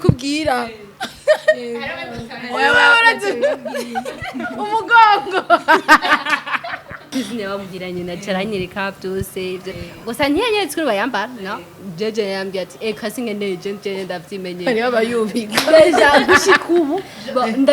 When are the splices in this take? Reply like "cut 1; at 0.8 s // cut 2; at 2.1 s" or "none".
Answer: cut 1; at 7.1 s